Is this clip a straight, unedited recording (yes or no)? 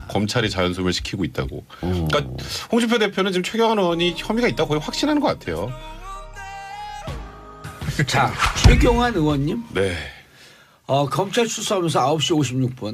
yes